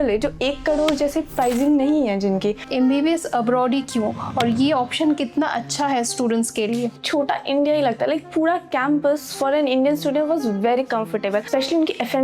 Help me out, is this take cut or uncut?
cut